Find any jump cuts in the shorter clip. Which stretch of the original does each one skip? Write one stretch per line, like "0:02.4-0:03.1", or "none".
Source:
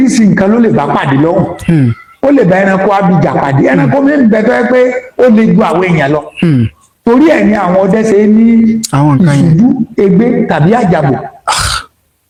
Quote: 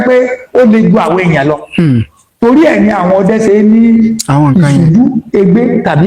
none